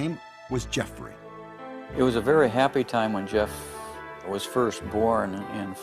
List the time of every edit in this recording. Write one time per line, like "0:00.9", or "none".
0:01.5